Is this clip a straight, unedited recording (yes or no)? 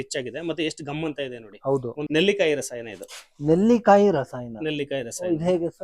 no